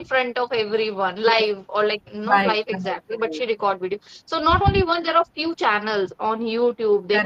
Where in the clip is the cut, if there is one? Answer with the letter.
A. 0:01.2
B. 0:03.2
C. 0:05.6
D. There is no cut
D